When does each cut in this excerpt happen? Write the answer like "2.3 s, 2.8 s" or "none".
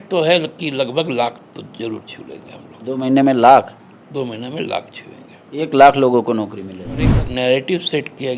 7.1 s